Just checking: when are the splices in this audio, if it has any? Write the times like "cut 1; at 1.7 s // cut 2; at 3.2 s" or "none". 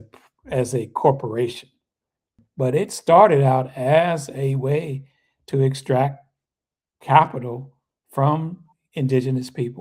cut 1; at 2.4 s